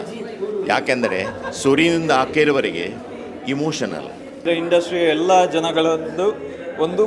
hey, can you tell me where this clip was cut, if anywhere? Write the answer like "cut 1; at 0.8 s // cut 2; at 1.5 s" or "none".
cut 1; at 4.4 s